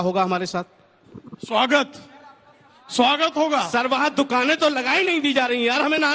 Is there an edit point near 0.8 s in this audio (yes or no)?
no